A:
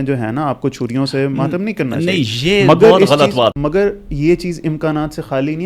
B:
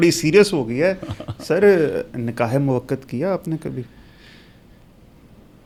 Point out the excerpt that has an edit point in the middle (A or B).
A